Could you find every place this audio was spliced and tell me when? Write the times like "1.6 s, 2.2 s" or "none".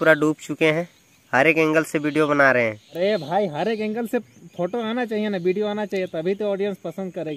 2.9 s